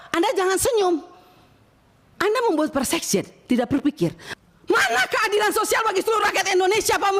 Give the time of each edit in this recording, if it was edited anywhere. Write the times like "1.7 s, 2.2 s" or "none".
4.2 s